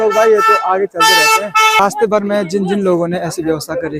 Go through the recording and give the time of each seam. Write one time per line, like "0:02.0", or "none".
0:01.8